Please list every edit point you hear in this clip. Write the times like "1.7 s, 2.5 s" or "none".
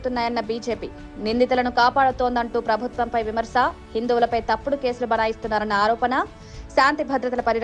none

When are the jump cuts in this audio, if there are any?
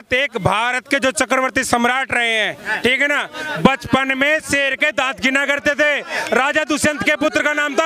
none

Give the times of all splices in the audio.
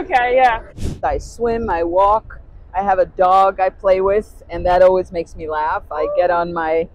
1.0 s

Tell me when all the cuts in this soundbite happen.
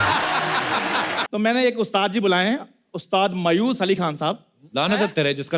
1.2 s

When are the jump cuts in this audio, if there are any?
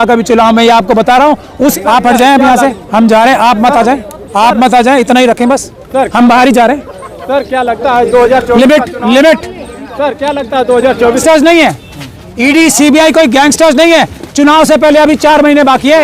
1.7 s, 11.2 s

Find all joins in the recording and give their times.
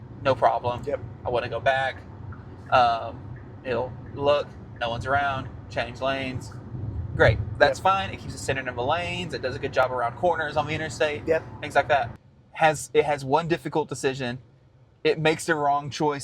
12.1 s

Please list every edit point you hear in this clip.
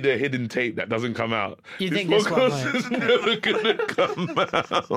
none

